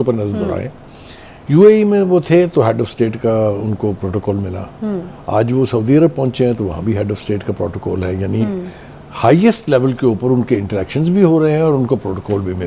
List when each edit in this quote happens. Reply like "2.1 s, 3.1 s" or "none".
none

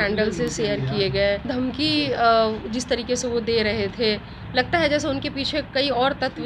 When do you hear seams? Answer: 1.5 s

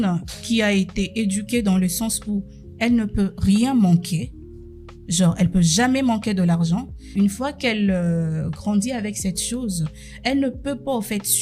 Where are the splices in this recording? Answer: 7.0 s

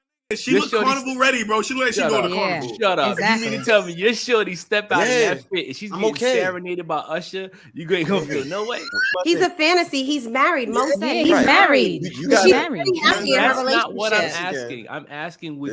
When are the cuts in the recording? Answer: 9.0 s

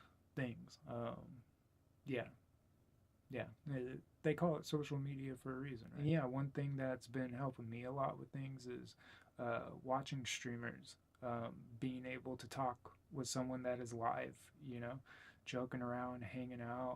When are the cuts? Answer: 6.1 s

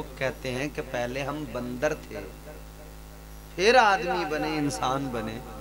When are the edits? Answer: none

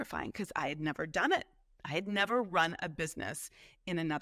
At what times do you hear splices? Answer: none

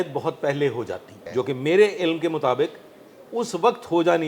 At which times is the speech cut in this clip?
1.1 s

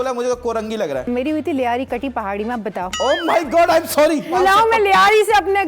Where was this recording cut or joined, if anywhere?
1.1 s, 2.9 s, 4.3 s

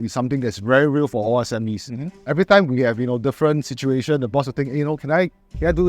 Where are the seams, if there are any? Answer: none

